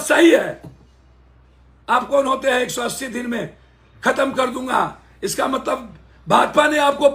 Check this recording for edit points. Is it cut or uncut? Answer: uncut